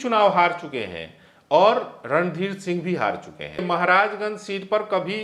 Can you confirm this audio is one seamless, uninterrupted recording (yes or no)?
no